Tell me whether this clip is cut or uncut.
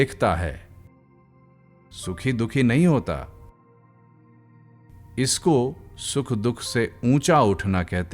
cut